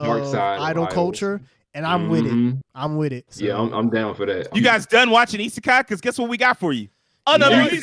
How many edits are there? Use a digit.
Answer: 1